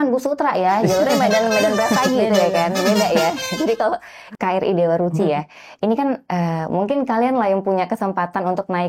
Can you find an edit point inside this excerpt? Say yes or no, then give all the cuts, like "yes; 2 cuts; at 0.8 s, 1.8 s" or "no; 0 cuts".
yes; 1 cut; at 4.1 s